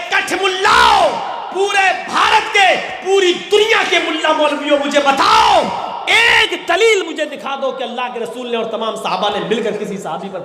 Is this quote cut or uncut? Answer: uncut